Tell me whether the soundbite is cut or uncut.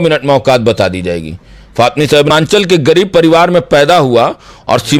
cut